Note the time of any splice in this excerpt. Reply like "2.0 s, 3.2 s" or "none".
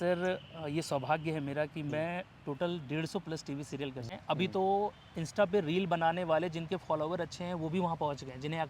4.0 s